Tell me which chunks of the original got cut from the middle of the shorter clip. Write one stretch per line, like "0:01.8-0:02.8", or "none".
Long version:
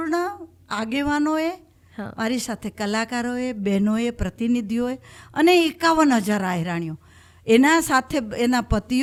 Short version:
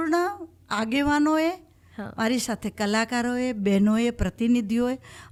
none